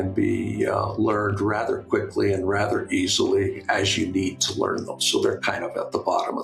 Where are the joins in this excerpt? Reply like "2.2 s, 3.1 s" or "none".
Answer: none